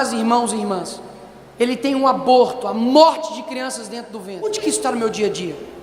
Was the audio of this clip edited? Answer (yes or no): yes